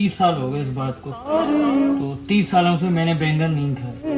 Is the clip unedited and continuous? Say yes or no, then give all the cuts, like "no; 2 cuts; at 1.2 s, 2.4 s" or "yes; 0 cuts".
yes; 0 cuts